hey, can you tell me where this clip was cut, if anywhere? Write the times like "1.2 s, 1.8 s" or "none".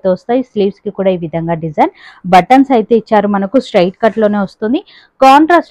none